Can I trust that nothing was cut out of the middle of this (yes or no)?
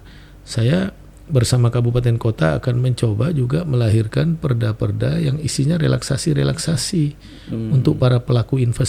yes